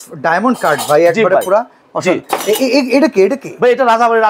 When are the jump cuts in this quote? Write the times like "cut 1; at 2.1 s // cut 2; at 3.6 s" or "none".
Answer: none